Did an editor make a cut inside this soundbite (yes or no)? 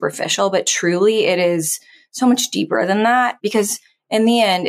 yes